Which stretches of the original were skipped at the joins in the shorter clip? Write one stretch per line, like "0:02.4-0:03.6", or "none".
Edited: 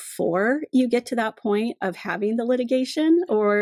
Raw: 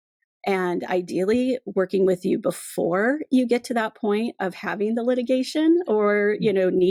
none